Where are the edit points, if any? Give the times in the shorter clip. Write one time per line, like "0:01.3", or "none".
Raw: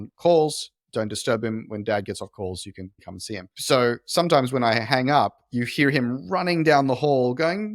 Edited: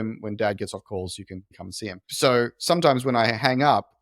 none